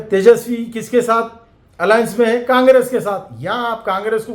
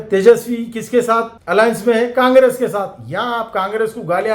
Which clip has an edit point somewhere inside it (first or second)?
second